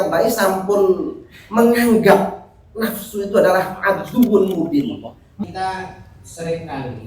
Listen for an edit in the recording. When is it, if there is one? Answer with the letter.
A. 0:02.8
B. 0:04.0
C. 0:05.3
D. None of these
C